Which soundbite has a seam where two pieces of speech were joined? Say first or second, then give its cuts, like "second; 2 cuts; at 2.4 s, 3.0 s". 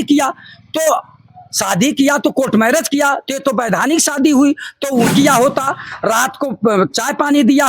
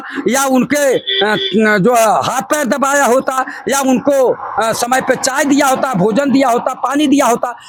first; 1 cut; at 5.1 s